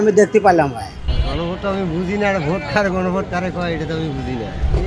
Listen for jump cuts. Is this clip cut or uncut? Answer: cut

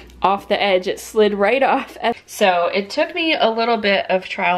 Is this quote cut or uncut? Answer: cut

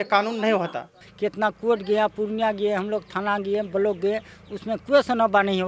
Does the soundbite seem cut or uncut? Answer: cut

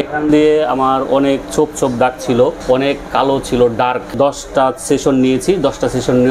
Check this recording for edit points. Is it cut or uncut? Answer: cut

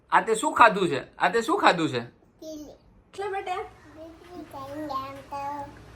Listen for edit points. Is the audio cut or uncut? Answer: cut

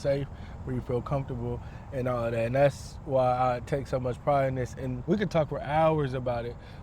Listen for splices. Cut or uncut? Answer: cut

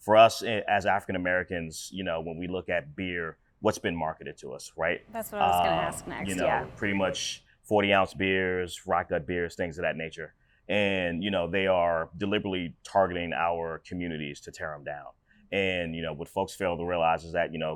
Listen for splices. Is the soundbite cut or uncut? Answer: uncut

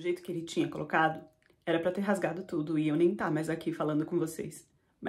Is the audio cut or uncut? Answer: uncut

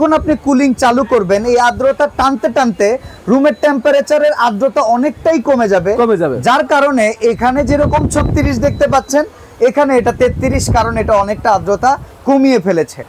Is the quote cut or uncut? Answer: uncut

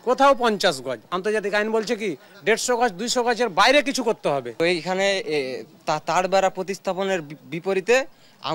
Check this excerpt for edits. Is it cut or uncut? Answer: cut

